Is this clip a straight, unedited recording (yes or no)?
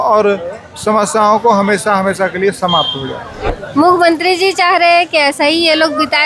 no